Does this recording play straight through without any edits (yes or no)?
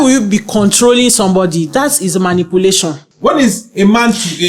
no